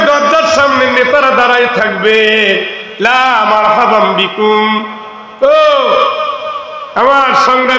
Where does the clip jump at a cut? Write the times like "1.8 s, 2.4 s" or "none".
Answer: none